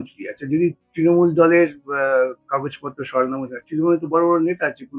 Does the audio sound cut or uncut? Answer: uncut